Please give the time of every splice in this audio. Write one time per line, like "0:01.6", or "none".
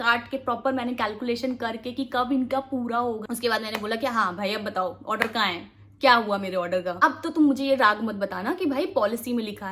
0:03.2
0:07.0